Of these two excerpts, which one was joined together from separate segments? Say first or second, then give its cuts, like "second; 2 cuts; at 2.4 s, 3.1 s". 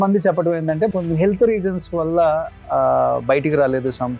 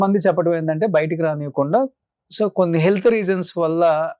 first; 1 cut; at 0.9 s